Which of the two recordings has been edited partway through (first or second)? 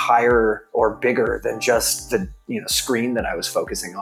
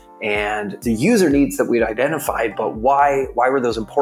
second